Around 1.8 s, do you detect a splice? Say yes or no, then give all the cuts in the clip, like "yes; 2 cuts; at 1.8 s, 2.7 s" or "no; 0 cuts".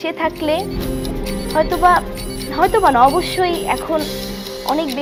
no; 0 cuts